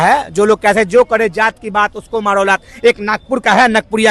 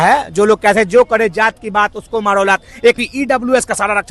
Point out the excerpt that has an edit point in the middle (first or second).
second